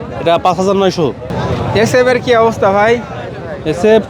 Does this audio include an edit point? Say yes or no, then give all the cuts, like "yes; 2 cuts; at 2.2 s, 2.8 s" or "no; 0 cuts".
yes; 1 cut; at 1.3 s